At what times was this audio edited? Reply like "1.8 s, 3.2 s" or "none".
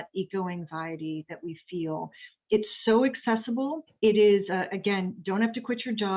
none